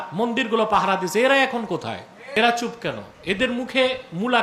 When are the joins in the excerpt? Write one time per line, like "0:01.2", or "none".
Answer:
0:02.4